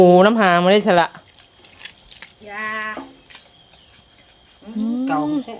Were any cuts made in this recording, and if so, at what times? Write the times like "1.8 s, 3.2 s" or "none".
none